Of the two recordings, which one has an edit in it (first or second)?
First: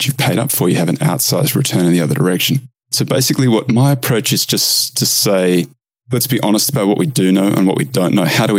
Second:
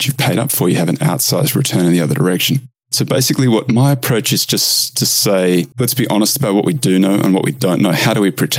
second